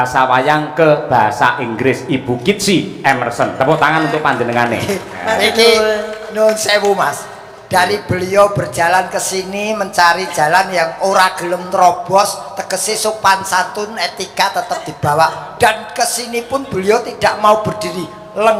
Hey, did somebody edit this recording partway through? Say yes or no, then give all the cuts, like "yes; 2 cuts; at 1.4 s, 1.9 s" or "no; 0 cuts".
no; 0 cuts